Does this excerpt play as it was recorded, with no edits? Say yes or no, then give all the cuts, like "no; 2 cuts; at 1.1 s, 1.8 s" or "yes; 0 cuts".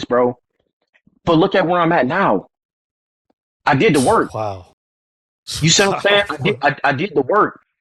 yes; 0 cuts